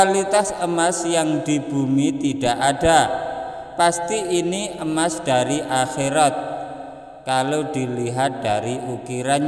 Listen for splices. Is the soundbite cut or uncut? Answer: uncut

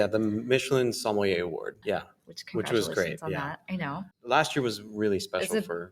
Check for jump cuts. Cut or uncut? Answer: cut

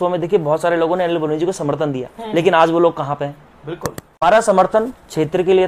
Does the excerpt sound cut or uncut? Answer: cut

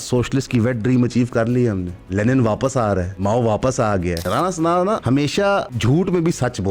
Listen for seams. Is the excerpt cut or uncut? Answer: cut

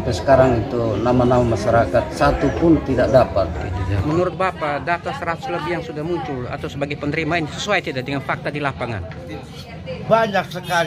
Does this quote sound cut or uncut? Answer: cut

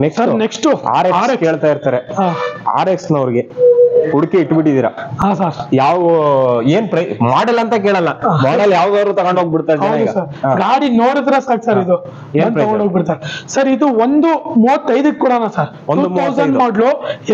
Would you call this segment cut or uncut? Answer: uncut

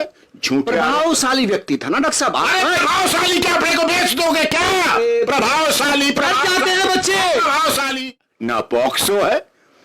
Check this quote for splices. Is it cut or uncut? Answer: cut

